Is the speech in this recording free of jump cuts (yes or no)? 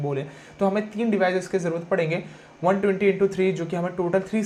yes